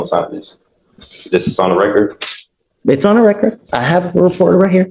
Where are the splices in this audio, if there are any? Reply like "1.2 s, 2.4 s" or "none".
none